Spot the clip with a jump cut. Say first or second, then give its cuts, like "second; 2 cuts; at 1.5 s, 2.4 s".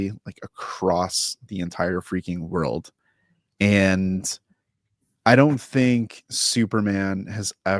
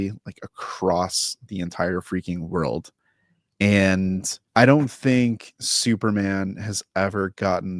second; 1 cut; at 4.3 s